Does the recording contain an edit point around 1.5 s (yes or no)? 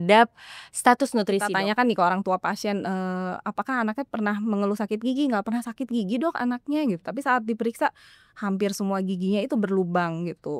yes